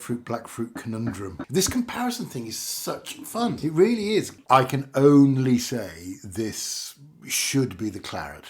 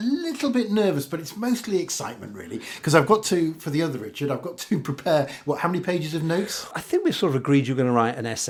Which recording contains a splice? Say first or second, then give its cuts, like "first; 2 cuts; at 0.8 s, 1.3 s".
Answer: first; 3 cuts; at 1.4 s, 3.6 s, 4.4 s